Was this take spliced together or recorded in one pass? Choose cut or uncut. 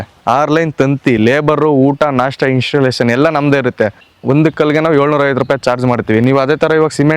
cut